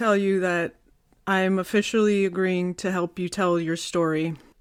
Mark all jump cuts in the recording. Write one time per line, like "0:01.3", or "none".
none